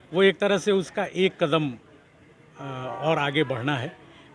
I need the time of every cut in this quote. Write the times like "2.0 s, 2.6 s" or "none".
none